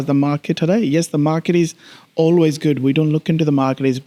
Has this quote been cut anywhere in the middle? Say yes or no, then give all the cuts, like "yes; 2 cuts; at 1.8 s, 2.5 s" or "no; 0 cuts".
no; 0 cuts